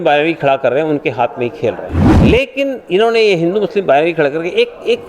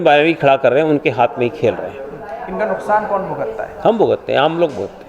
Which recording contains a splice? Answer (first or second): first